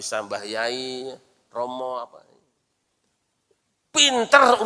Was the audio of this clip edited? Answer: yes; 1 cut; at 2.2 s

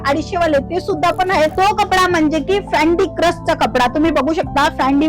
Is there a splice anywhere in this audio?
yes; 1 cut; at 1.5 s

